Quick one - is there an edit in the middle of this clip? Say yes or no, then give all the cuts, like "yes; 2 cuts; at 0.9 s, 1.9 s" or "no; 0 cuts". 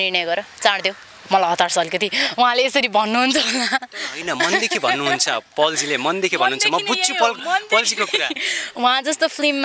no; 0 cuts